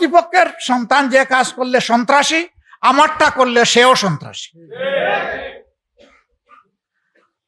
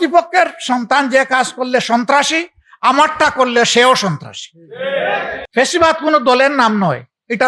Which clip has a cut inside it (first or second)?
second